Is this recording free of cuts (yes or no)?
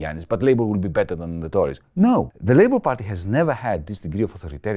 no